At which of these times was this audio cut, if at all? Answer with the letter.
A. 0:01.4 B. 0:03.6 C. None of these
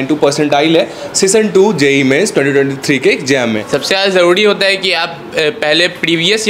B